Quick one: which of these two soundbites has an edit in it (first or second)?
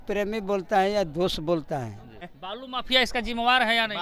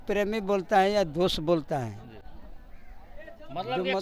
first